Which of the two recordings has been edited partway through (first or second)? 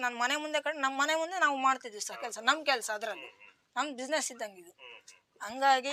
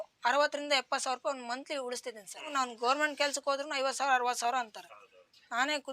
second